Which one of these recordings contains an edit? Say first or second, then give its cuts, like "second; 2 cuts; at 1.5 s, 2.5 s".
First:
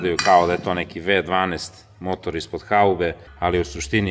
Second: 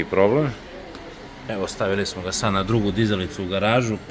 first; 1 cut; at 3.2 s